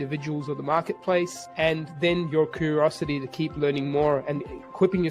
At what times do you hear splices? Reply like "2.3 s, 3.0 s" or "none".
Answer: 1.4 s